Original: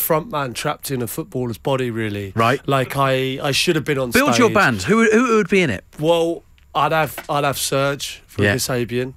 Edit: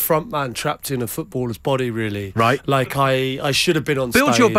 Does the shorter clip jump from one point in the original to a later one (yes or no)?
no